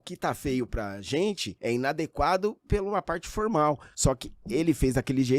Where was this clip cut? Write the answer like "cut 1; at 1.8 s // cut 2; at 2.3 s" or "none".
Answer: cut 1; at 1.5 s // cut 2; at 3.9 s